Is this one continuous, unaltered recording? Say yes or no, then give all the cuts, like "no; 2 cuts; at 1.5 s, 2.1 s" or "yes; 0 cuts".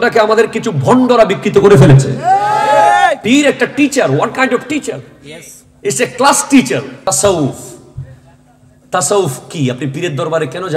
no; 1 cut; at 7.1 s